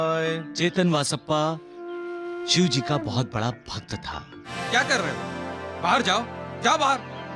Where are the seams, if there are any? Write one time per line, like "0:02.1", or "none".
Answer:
0:04.5

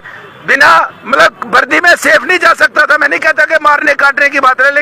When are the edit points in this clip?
none

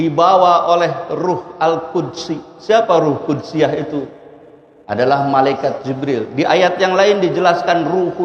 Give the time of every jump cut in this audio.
none

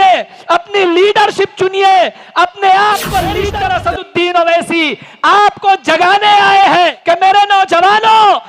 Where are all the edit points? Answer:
0:03.5
0:07.0

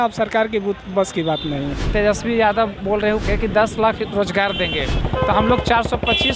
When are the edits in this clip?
0:01.9
0:03.2
0:05.0

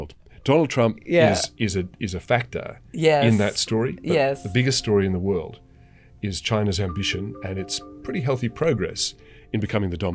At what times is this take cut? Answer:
none

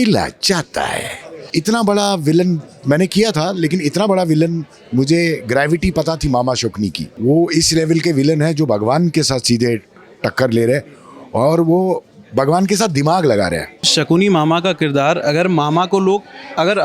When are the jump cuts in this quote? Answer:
0:01.5
0:07.0
0:13.9

